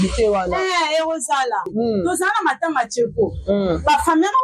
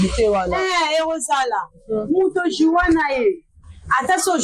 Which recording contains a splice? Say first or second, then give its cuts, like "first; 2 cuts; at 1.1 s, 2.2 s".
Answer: first; 1 cut; at 1.7 s